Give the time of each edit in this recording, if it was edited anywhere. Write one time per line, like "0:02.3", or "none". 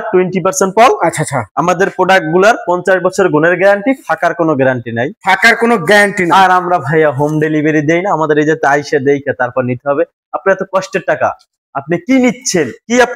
none